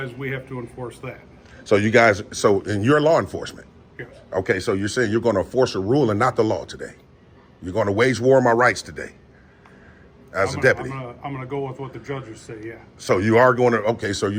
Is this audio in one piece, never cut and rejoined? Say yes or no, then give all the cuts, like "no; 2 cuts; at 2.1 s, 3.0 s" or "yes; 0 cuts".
yes; 0 cuts